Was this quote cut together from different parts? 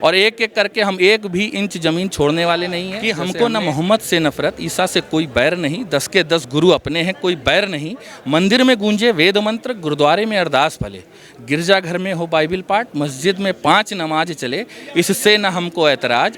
yes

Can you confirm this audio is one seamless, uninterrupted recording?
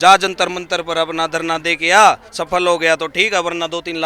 yes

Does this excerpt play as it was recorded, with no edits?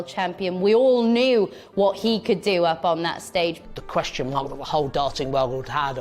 no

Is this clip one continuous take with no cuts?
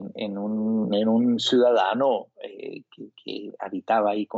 yes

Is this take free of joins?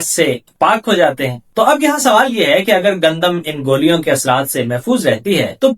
no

